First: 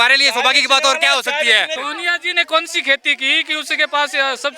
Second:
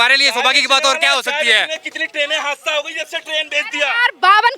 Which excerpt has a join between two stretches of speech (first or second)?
first